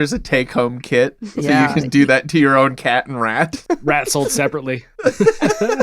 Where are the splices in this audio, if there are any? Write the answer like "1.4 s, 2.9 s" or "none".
3.6 s, 4.9 s